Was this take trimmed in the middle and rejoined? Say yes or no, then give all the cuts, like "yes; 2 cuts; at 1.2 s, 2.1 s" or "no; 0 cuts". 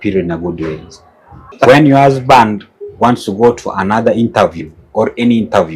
yes; 1 cut; at 1.5 s